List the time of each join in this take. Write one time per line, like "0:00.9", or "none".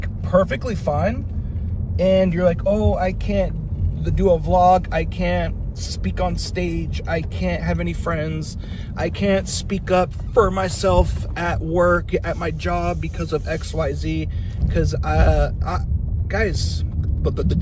none